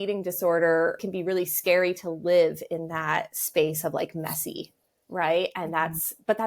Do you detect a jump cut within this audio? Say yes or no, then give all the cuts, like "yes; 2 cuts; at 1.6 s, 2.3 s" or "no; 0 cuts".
yes; 1 cut; at 1.0 s